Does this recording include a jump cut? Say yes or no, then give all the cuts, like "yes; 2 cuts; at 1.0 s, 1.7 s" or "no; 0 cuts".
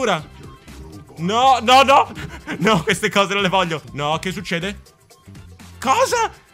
yes; 1 cut; at 3.9 s